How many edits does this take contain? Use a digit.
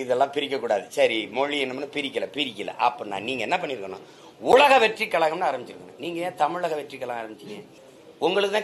0